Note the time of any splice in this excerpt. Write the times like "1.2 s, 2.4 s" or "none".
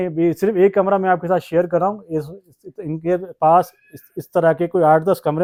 none